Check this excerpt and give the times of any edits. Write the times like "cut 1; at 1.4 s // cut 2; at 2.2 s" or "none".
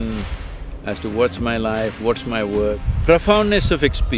cut 1; at 2.8 s